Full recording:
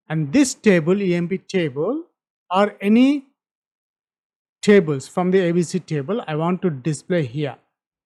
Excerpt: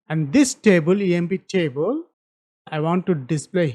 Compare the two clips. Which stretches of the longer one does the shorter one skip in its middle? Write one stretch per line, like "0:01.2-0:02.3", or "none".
0:02.4-0:06.0